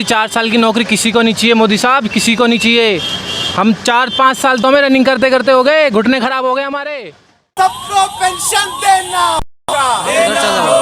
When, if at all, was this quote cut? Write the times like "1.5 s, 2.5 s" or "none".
7.5 s